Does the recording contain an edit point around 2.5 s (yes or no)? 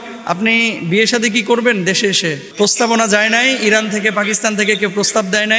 yes